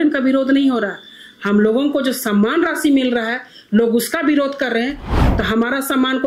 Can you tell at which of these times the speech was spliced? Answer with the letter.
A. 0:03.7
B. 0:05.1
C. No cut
B